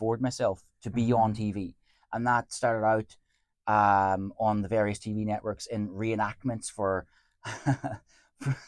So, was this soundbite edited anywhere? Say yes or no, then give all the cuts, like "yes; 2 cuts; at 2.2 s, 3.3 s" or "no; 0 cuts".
no; 0 cuts